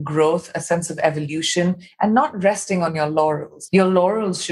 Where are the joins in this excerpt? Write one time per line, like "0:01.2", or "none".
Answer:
0:03.5